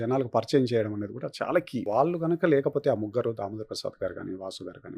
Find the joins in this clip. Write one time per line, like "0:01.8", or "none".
0:01.9